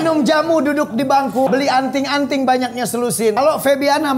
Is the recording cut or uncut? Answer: cut